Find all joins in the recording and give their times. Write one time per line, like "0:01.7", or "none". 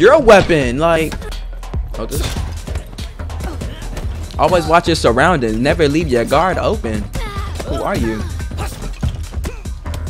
0:01.0